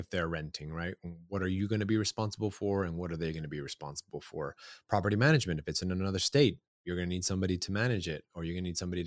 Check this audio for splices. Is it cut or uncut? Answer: uncut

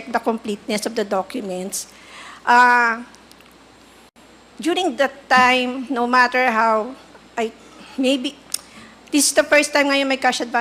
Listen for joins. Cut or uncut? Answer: uncut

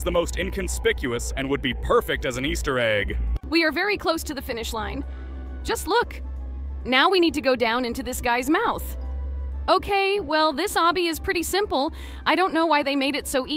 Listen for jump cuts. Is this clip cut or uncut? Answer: uncut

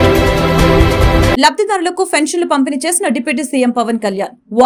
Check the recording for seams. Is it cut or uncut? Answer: uncut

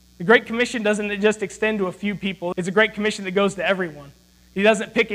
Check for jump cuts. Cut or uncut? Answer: cut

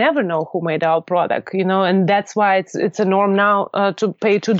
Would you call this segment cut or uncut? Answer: uncut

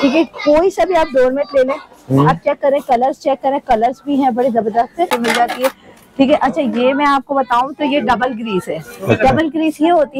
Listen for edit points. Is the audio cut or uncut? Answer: cut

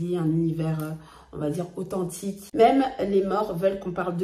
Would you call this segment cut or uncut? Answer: cut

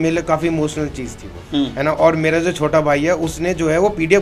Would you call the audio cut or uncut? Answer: uncut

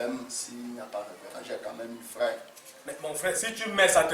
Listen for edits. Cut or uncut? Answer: uncut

